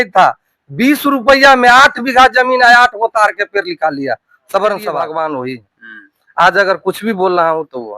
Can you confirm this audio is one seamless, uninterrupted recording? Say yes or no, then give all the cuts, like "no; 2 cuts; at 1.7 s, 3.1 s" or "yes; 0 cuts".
no; 1 cut; at 4.9 s